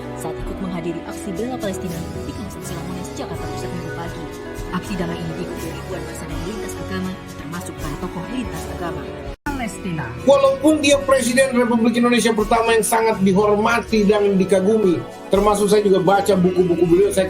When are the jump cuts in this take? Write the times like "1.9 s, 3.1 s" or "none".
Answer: 9.4 s